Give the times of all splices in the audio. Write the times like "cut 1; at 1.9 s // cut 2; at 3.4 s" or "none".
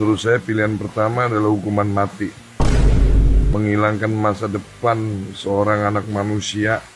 none